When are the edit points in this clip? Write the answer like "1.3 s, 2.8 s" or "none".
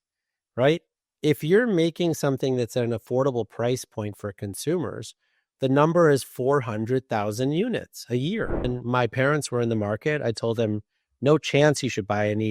8.7 s